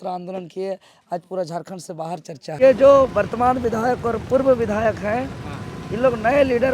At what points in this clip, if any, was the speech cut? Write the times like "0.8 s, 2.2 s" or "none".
2.6 s